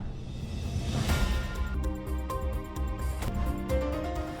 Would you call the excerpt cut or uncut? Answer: cut